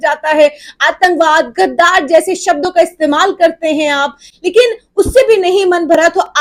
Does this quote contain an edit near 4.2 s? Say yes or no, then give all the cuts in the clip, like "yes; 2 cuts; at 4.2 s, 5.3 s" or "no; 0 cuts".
no; 0 cuts